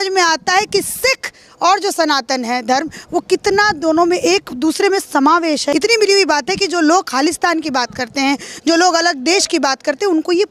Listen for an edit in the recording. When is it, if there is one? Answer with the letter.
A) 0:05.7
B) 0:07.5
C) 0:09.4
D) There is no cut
A